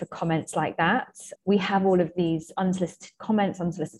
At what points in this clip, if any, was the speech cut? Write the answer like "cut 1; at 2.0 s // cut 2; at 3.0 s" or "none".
cut 1; at 1.2 s